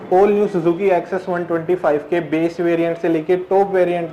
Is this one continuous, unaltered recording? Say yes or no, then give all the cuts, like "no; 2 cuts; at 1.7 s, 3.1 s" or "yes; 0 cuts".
yes; 0 cuts